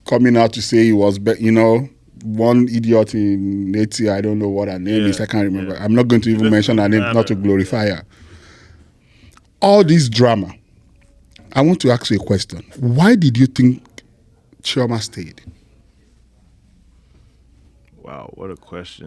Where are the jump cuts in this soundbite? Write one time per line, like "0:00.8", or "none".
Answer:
none

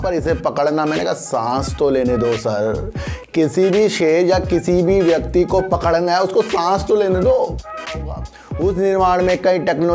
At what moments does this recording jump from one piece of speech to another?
0:08.0

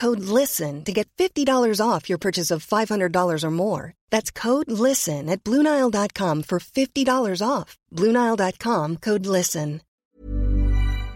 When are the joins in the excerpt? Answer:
0:10.0

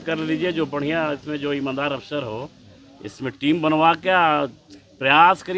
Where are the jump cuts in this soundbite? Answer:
none

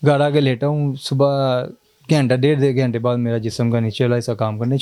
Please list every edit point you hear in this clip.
none

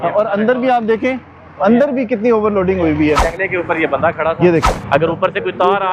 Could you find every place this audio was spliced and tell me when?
0:03.3
0:04.8

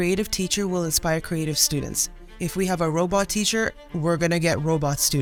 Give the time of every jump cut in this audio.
none

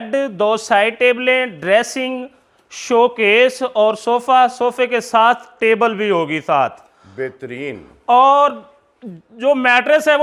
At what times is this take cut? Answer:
none

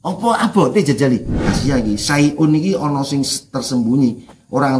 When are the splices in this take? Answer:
0:01.5

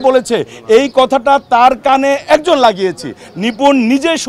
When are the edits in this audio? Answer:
none

